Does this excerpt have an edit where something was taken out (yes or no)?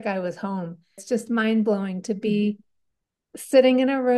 yes